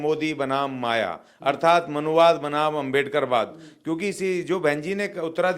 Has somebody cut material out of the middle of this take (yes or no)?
no